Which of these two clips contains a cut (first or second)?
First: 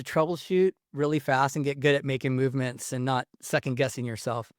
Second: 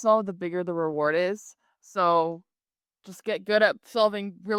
first